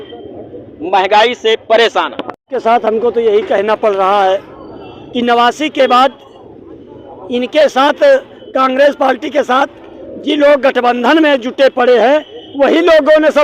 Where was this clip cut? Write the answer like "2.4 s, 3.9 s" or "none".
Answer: 2.5 s